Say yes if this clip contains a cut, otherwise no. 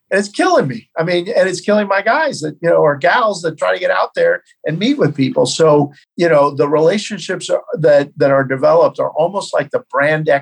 yes